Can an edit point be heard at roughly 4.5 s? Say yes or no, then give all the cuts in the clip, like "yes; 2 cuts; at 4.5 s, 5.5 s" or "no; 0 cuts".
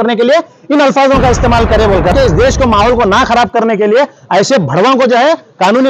no; 1 cut; at 2.1 s